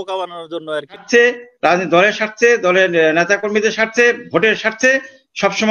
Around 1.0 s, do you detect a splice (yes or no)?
yes